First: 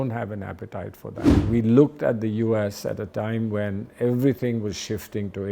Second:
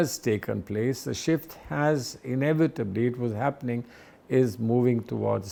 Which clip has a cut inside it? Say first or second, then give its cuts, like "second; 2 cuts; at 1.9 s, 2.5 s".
first; 1 cut; at 1.3 s